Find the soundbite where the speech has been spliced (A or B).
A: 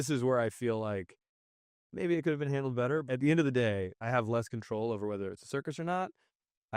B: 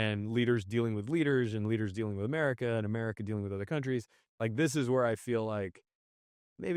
A